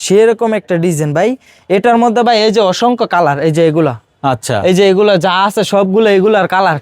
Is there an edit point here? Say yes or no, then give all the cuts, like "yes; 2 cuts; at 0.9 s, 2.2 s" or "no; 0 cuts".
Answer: no; 0 cuts